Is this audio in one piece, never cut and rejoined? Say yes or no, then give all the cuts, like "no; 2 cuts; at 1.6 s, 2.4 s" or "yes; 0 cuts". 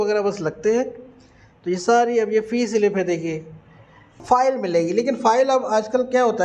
no; 1 cut; at 4.2 s